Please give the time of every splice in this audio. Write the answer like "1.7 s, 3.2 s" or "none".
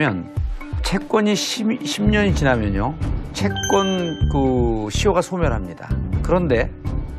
4.3 s

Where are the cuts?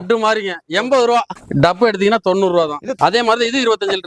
3.0 s

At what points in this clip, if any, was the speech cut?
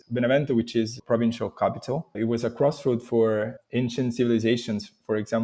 1.0 s, 2.1 s

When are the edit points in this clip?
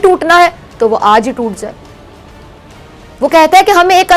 none

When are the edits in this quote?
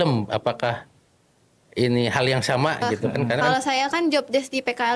3.4 s

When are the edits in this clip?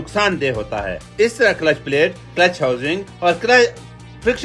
none

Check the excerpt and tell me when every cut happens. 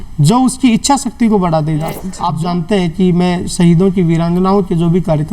2.1 s

